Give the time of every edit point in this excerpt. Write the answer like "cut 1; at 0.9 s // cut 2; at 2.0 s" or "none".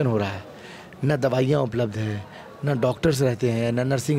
none